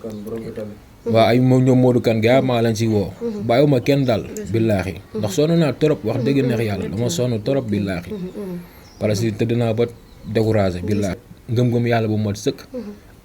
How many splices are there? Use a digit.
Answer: 1